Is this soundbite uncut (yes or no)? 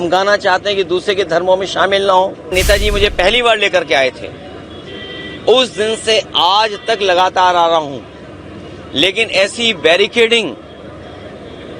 no